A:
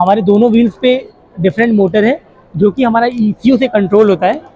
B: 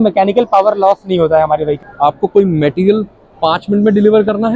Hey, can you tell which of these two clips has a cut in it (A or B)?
B